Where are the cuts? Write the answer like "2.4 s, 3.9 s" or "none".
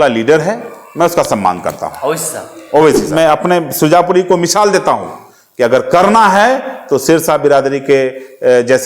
3.0 s